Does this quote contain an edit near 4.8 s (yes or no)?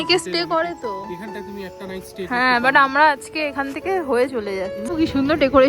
yes